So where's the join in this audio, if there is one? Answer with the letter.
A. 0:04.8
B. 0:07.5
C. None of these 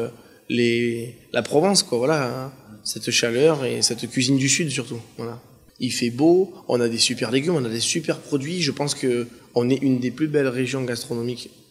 B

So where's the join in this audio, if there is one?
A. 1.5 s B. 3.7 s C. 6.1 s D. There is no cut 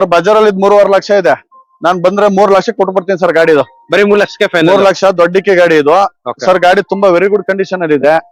D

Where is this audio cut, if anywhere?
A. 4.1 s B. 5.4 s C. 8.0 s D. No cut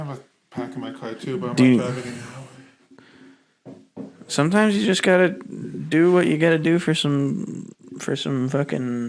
D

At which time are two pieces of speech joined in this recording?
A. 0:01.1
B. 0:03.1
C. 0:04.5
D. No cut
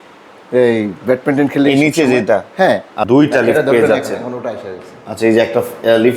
B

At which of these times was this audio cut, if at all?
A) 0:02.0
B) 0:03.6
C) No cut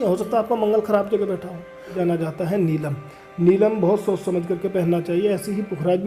A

